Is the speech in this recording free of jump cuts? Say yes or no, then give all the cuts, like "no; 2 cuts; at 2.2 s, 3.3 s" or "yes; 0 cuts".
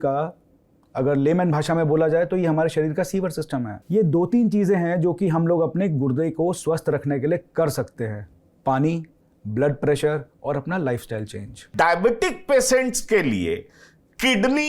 no; 2 cuts; at 3.8 s, 11.7 s